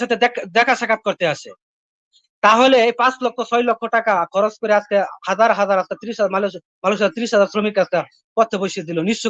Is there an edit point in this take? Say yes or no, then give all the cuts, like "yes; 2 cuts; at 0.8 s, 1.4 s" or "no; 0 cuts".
no; 0 cuts